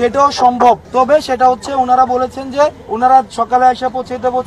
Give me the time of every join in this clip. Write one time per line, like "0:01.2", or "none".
0:01.3
0:02.8